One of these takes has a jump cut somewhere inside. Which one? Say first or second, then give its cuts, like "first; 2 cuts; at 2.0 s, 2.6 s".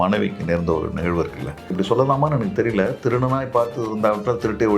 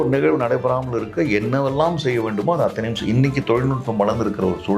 first; 1 cut; at 1.7 s